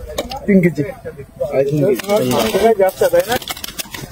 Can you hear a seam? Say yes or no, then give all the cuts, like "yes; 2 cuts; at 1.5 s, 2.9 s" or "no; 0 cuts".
no; 0 cuts